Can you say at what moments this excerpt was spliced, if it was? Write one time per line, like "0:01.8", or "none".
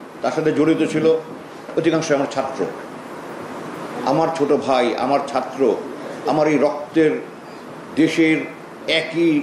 none